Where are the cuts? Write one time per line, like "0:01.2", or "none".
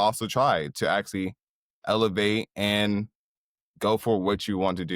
none